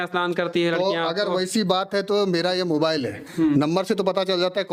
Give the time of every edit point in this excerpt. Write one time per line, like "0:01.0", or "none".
none